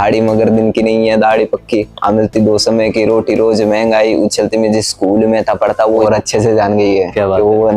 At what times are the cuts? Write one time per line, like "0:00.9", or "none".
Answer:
0:06.0